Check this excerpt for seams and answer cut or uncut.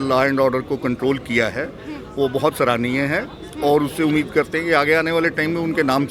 uncut